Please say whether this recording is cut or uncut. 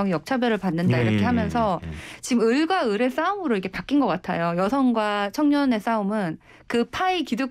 uncut